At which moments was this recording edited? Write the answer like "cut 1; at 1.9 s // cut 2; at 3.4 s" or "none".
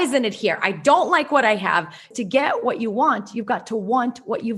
cut 1; at 2.1 s